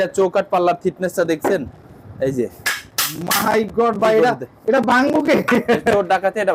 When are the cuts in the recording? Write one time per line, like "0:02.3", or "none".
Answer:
none